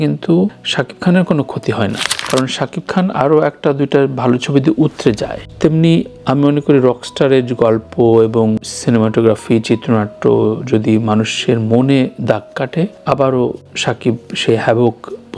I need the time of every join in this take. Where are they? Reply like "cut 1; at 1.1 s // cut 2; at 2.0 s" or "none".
none